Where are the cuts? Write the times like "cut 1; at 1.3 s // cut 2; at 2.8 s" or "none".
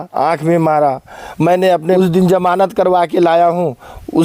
cut 1; at 2.0 s